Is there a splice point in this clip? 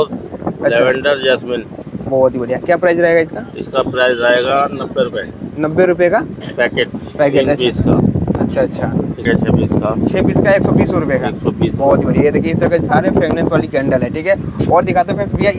no; 0 cuts

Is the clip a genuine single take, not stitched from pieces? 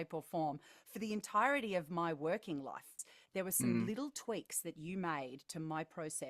no; 1 cut; at 3.0 s

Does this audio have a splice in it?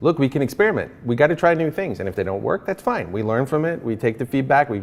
no; 0 cuts

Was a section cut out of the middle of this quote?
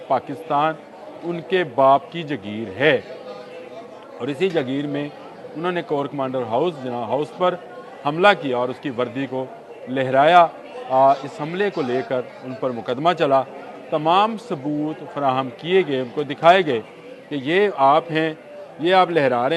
no; 0 cuts

